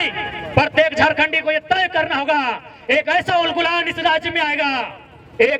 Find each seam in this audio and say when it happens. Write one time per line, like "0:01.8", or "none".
none